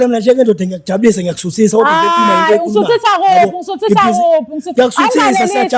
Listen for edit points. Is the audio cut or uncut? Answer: uncut